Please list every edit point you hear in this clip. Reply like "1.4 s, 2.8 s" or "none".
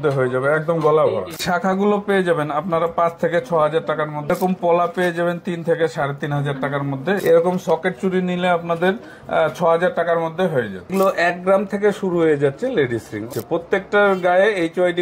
1.3 s, 4.3 s, 7.2 s, 10.9 s, 13.3 s